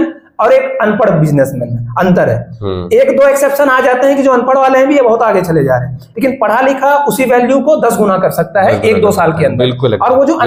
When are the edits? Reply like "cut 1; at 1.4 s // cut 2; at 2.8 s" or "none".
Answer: none